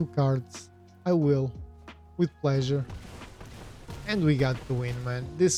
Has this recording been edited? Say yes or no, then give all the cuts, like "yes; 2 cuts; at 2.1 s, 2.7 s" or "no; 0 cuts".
no; 0 cuts